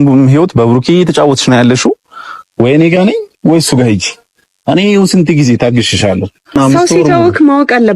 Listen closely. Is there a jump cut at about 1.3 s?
no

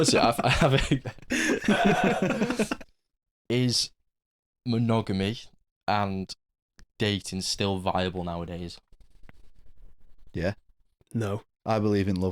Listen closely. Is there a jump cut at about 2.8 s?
yes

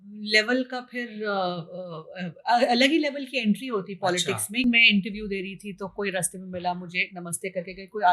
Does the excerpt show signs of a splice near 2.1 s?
no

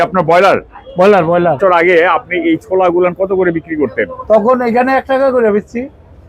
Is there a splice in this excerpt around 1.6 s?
yes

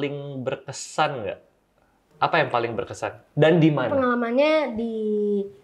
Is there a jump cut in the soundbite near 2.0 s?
yes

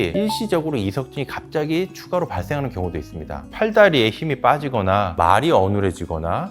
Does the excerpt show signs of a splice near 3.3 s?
yes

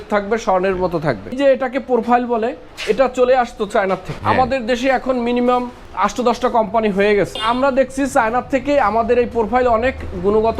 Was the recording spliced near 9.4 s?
no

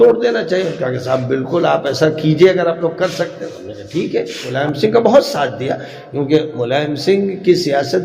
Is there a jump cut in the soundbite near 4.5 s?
yes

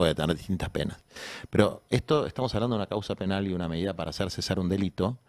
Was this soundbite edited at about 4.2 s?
no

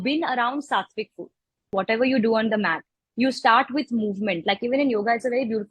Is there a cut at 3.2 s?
no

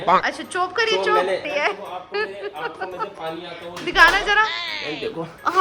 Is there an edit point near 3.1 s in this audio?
no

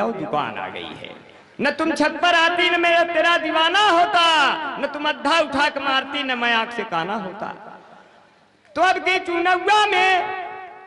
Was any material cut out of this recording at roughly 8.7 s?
no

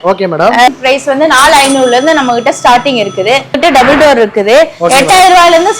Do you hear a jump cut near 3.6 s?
yes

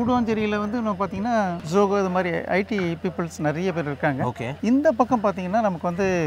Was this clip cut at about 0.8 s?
no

